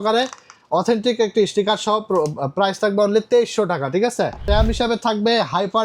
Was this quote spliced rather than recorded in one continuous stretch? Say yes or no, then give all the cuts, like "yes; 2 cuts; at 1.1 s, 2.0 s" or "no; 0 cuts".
yes; 1 cut; at 4.5 s